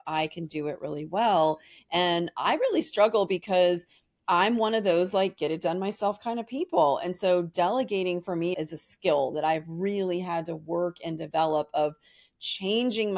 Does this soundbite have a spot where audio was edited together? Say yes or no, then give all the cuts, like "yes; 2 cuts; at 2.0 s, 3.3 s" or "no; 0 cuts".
yes; 1 cut; at 8.5 s